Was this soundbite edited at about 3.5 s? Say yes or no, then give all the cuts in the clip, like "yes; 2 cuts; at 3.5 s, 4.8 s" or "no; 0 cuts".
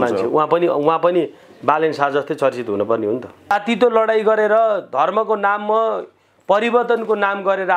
yes; 1 cut; at 3.5 s